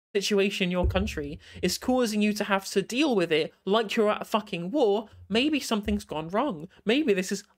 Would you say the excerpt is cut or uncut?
uncut